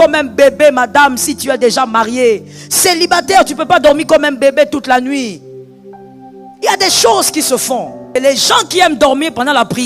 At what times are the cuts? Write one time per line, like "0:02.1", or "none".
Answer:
0:08.1